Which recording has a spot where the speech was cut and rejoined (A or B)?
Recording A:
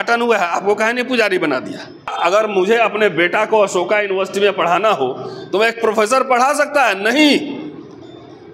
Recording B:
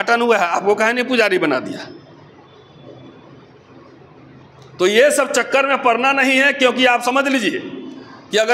A